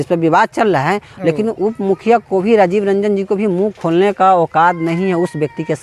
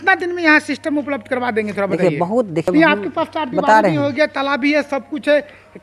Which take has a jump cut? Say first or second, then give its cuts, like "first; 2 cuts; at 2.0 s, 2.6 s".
second; 1 cut; at 2.7 s